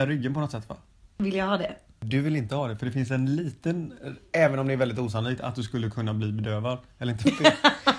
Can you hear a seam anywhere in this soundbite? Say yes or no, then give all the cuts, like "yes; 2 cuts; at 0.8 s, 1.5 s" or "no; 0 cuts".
yes; 2 cuts; at 1.1 s, 2.0 s